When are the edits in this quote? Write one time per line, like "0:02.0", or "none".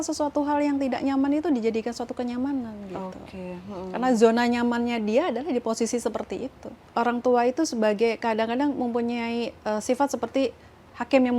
0:06.9